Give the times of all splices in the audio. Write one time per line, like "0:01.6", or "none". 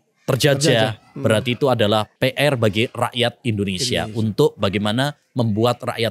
0:02.1

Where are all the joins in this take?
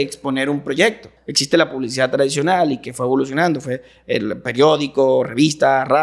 0:01.2

